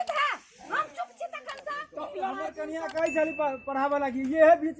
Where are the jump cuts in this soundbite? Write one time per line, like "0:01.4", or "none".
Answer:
0:02.4